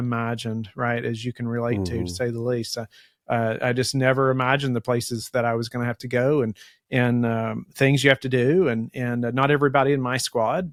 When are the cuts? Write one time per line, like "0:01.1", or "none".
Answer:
none